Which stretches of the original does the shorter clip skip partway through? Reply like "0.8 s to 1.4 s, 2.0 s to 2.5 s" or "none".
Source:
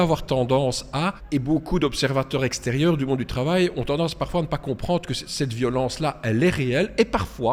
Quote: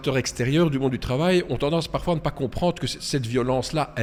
none